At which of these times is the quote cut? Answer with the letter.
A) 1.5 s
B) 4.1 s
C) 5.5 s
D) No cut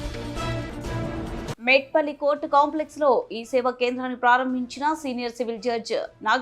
A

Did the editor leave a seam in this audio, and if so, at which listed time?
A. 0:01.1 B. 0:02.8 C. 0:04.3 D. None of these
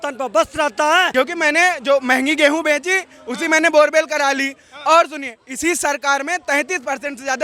A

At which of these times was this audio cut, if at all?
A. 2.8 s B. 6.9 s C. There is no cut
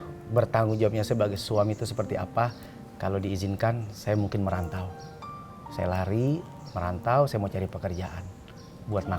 C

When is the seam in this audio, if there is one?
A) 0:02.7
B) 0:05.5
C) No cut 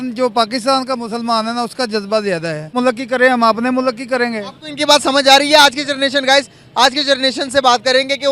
A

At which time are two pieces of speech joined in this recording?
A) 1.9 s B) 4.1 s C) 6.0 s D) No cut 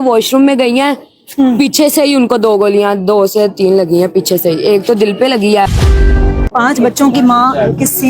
C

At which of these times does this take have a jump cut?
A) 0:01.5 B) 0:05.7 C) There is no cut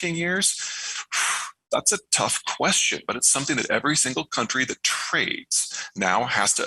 C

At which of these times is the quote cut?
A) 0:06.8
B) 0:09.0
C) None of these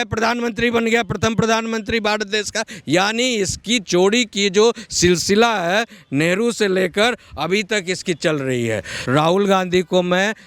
B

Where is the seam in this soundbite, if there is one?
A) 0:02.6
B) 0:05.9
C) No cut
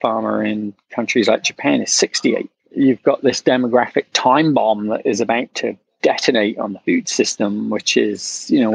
A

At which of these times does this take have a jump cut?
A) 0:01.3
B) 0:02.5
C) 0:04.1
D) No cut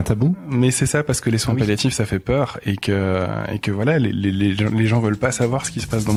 D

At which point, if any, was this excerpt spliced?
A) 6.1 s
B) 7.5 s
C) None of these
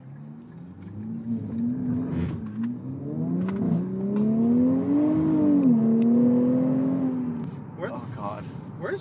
B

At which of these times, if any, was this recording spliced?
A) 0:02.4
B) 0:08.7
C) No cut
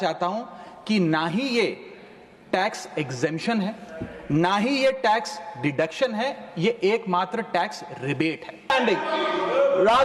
B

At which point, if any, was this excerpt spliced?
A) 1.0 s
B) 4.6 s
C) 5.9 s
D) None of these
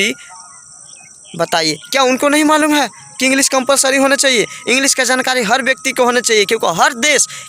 D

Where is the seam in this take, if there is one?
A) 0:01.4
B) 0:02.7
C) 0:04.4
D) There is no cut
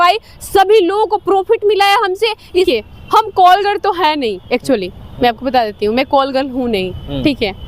B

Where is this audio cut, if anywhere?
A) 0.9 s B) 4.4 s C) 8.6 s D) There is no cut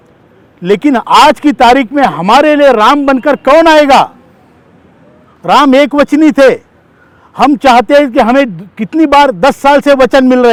D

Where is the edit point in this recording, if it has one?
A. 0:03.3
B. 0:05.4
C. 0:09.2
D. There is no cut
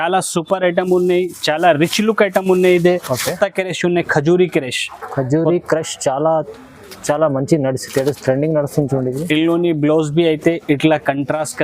A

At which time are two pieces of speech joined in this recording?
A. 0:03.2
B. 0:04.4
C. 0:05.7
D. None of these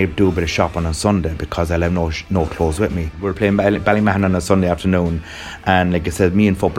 A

